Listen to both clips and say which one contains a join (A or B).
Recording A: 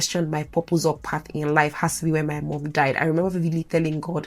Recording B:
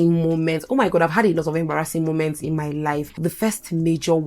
B